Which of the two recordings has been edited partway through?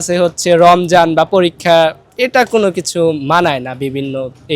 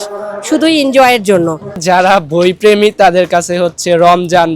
second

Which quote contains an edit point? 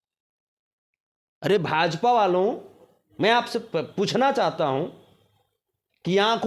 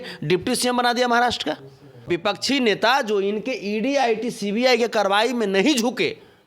second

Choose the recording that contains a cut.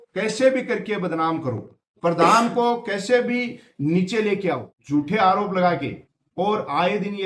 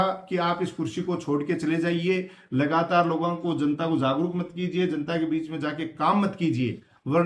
first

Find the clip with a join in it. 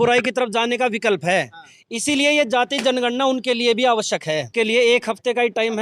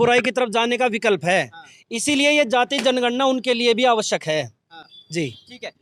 first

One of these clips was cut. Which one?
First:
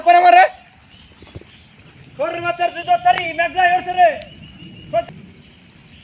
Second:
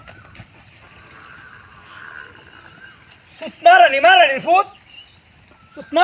first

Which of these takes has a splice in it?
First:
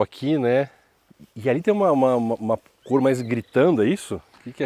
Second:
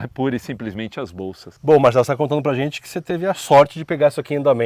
second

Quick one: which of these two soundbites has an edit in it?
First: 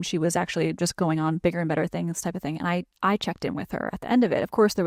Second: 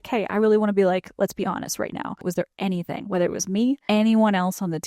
second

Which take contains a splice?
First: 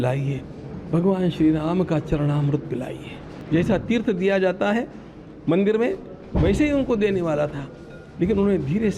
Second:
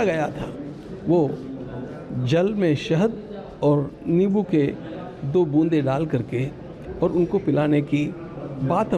first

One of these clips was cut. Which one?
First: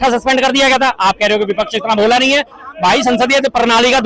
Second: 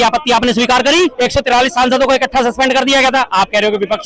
second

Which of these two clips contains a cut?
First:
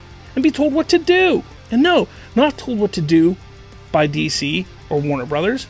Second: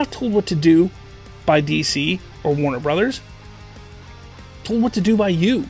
first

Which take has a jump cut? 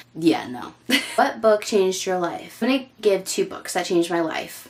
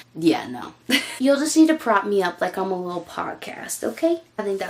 second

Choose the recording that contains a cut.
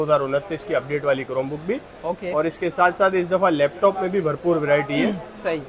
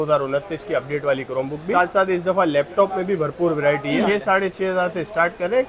second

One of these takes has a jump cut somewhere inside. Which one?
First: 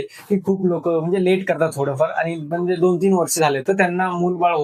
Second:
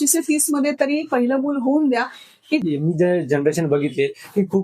second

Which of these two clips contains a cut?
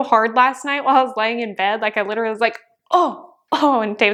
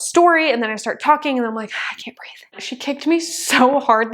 second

